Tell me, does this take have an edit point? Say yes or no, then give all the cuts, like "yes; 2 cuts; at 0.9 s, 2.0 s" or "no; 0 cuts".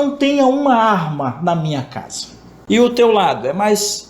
yes; 1 cut; at 2.5 s